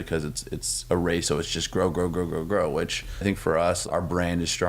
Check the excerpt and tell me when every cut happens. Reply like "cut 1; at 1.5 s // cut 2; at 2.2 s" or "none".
cut 1; at 1.2 s // cut 2; at 3.2 s // cut 3; at 3.8 s